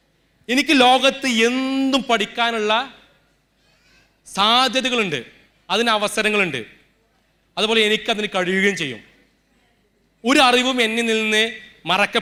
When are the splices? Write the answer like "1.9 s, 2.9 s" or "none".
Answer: none